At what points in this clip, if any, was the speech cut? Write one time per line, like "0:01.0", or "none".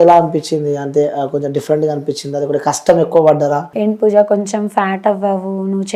0:03.7